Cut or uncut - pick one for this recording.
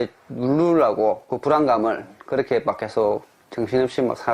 uncut